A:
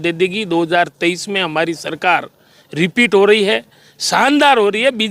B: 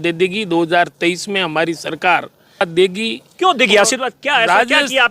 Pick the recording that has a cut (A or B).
B